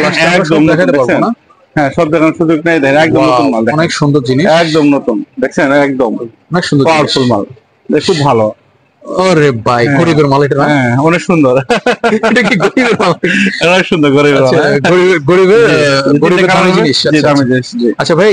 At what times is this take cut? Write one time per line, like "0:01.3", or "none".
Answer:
none